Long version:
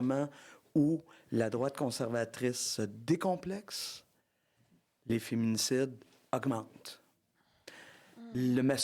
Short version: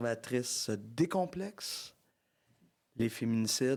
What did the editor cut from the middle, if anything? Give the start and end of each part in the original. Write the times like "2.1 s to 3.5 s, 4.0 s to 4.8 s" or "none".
none

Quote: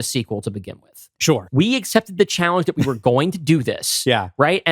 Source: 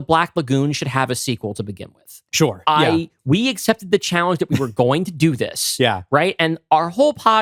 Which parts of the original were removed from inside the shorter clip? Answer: 2.6 s to 3.2 s

